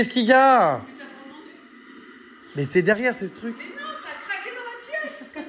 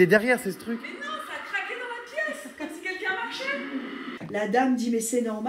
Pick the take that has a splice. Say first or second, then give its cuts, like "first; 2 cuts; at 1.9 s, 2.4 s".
second; 1 cut; at 4.2 s